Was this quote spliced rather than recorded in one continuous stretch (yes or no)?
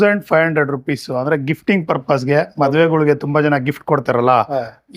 no